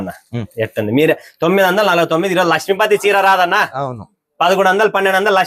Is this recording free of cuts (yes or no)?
yes